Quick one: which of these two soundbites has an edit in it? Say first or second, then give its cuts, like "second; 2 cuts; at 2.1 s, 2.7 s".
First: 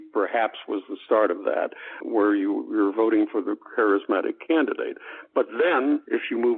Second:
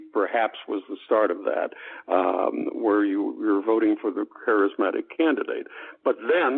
first; 1 cut; at 2.0 s